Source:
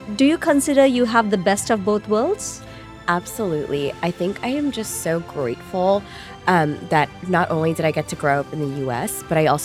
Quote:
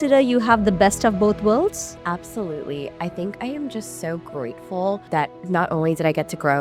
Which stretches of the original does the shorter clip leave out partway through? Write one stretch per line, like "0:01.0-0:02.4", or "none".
0:02.6-0:02.9
0:06.1-0:06.8

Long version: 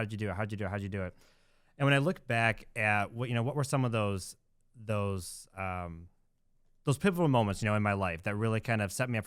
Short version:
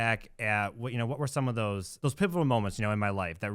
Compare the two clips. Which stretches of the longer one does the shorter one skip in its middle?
0:04.3-0:06.7

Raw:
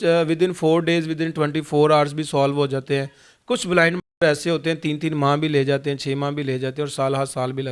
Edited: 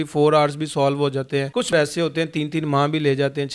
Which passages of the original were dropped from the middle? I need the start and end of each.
0:03.2-0:04.1

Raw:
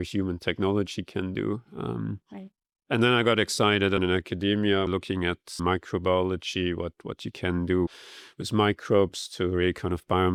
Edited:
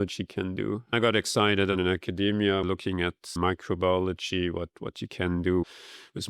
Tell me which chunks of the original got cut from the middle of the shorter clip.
0:01.7-0:03.2

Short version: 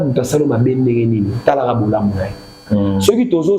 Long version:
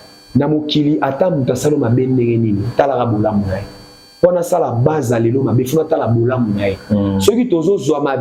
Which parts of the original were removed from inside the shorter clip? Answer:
0:03.9-0:06.8

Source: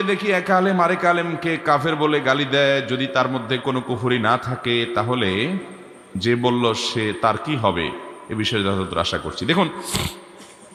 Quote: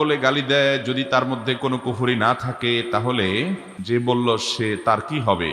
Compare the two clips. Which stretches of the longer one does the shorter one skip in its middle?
0:05.7-0:06.1

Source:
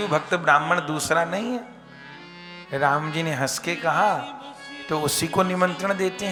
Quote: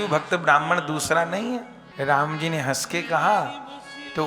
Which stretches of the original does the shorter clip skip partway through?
0:01.8-0:02.5

